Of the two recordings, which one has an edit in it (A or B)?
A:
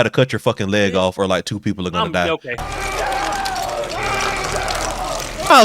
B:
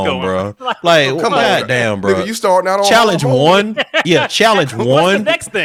A